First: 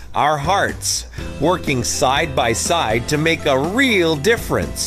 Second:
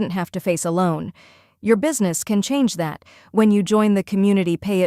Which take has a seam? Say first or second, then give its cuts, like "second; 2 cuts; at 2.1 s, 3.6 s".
second; 1 cut; at 2.2 s